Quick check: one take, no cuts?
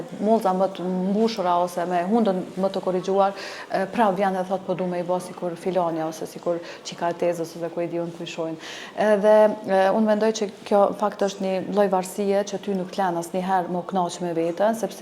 yes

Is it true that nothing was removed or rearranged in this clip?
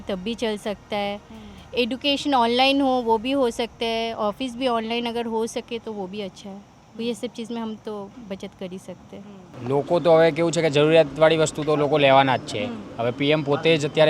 no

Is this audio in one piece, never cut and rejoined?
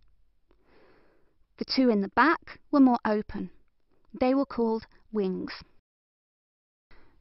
yes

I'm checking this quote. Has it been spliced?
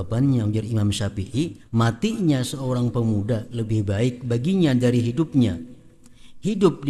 yes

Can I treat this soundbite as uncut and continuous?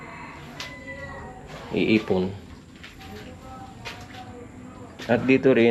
yes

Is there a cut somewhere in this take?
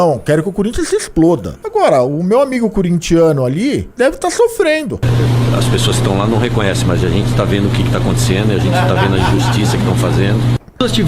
yes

